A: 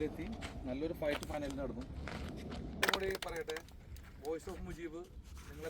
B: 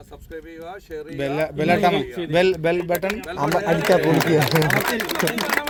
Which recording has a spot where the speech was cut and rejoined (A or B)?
A